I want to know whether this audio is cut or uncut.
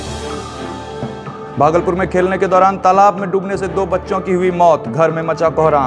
cut